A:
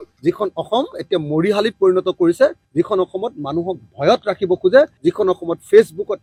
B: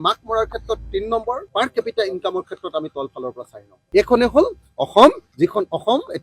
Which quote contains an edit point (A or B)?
B